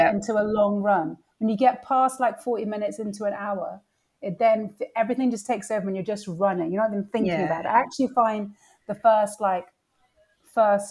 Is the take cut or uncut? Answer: uncut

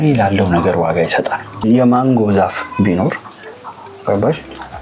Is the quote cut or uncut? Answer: uncut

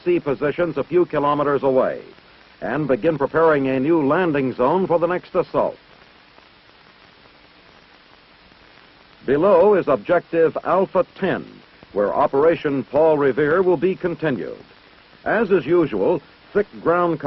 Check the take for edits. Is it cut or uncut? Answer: cut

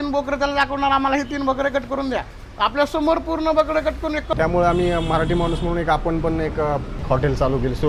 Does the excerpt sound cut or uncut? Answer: cut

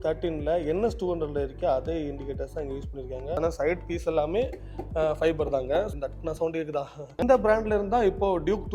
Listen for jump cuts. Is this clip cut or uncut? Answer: cut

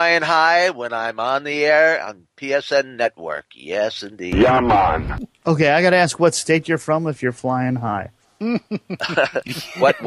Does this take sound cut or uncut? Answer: uncut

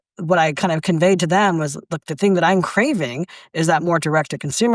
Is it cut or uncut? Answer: uncut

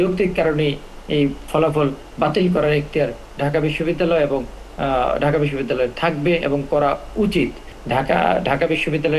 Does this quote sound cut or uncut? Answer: cut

